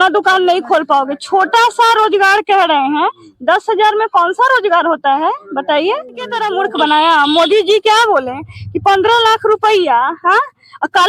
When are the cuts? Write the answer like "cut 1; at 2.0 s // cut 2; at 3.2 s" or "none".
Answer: cut 1; at 6.4 s